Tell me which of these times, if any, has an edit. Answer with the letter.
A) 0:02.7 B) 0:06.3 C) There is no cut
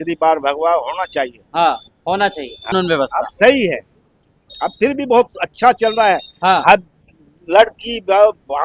A